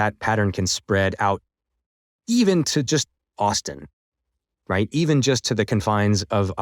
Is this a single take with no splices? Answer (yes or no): yes